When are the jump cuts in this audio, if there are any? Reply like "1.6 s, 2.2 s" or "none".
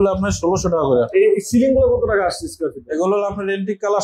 1.1 s